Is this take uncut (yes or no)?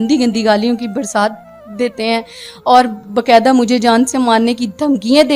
yes